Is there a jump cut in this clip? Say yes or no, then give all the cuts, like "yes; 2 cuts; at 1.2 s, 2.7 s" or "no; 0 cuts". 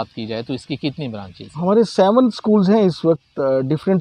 no; 0 cuts